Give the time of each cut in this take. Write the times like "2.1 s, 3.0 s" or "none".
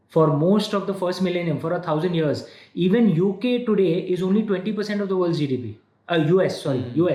none